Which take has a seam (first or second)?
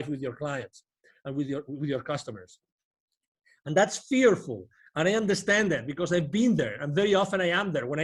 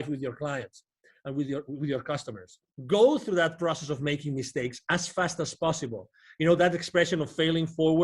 second